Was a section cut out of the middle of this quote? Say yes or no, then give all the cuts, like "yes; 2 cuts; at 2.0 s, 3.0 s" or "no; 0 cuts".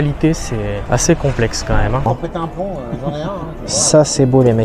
yes; 2 cuts; at 0.8 s, 2.1 s